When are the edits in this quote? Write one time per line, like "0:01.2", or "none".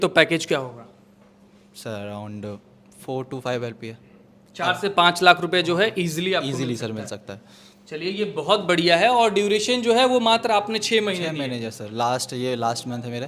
none